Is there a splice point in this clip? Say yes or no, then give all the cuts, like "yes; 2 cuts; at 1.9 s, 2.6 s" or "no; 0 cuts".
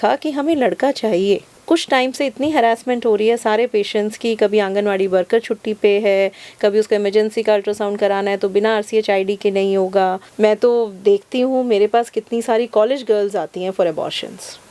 yes; 2 cuts; at 1.6 s, 10.2 s